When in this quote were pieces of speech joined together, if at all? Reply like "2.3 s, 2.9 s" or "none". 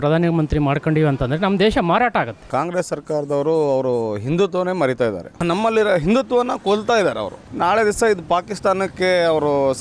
2.4 s, 5.4 s, 7.5 s